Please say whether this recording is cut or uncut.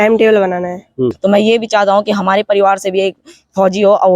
cut